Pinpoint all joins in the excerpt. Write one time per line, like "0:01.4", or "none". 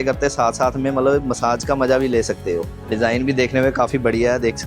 none